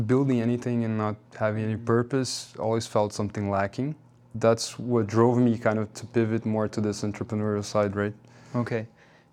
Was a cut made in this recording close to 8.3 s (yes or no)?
no